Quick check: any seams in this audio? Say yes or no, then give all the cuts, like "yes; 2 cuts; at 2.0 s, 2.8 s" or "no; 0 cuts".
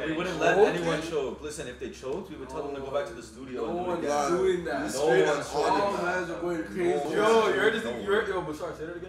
no; 0 cuts